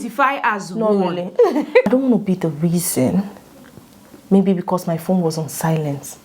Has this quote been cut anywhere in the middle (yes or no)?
yes